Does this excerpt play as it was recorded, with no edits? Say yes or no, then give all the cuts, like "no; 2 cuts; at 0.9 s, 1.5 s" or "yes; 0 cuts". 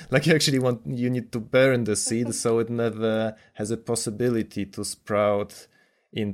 yes; 0 cuts